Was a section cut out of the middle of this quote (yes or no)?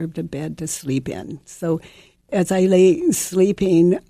yes